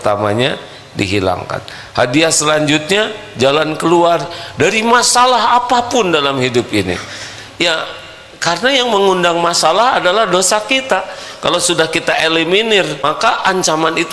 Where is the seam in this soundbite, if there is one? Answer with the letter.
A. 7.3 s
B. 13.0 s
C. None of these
B